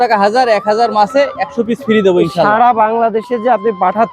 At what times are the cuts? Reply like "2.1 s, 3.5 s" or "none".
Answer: none